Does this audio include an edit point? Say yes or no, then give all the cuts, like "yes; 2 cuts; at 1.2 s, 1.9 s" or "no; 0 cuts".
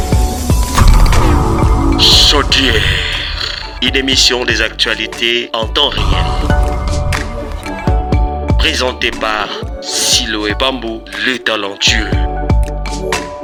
no; 0 cuts